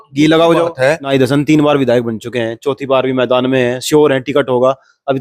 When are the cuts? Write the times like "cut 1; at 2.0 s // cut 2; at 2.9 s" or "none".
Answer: cut 1; at 1.0 s